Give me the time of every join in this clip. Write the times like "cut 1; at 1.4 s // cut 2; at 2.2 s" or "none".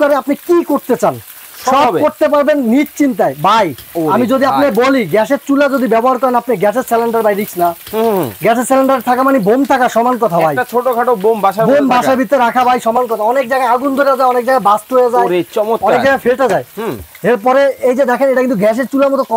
none